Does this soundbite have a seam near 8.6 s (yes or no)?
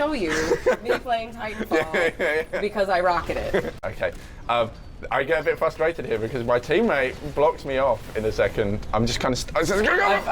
no